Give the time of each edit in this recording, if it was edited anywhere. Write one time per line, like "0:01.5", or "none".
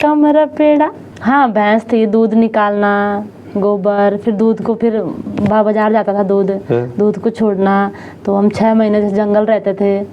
0:01.1